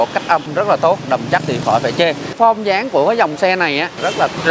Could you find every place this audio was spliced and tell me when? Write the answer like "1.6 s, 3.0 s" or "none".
2.3 s